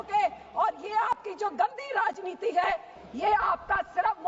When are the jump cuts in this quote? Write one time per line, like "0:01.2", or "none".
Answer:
0:03.0